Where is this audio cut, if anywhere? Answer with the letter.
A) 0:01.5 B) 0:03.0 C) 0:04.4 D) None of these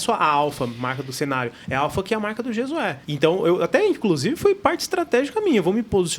B